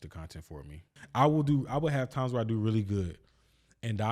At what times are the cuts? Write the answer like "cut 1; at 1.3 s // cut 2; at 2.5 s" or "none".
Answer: cut 1; at 1.0 s